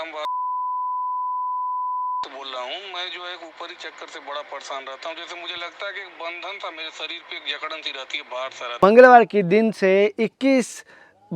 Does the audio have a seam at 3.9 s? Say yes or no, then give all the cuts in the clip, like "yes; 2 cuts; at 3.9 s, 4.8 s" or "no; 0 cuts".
no; 1 cut; at 8.8 s